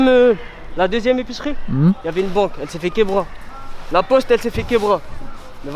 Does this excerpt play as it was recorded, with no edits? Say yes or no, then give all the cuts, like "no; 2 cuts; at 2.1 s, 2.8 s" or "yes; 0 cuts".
yes; 0 cuts